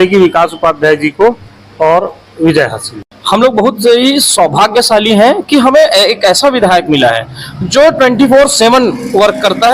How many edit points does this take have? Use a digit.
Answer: 1